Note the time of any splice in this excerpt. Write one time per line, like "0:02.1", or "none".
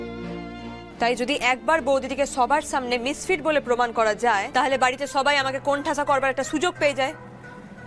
0:00.9
0:04.5